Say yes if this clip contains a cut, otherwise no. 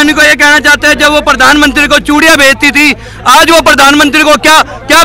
no